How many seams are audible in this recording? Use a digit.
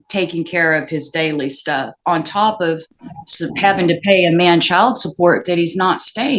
0